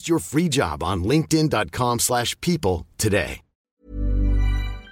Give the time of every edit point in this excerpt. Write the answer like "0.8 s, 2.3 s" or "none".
3.7 s